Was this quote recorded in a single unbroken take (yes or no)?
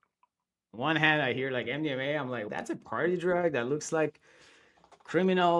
yes